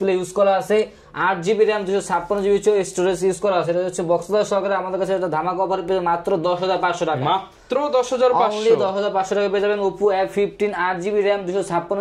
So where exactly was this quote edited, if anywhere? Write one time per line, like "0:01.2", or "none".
none